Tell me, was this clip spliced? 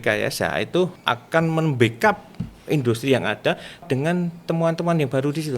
yes; 2 cuts; at 1.0 s, 3.8 s

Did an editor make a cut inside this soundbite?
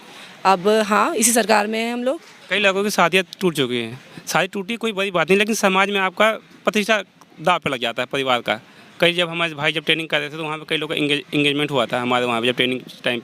yes; 1 cut; at 2.4 s

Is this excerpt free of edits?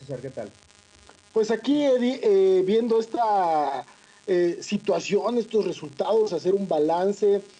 no; 1 cut; at 1.9 s

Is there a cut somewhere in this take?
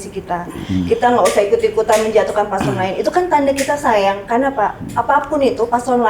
no; 0 cuts

